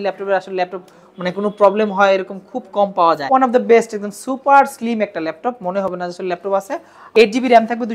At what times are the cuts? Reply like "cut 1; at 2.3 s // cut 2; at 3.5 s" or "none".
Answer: cut 1; at 3.2 s // cut 2; at 7.0 s